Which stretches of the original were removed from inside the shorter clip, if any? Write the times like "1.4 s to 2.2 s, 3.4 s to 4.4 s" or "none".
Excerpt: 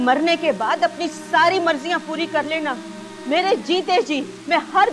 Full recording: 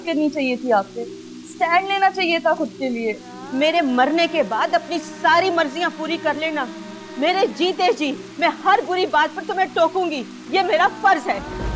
none